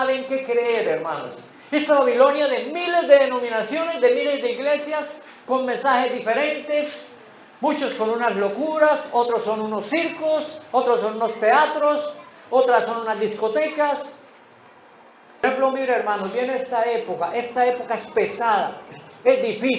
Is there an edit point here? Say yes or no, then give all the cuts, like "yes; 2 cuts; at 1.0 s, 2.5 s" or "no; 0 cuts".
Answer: yes; 1 cut; at 15.4 s